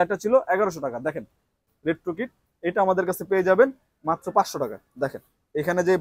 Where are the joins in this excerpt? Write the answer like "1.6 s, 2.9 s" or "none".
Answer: 1.7 s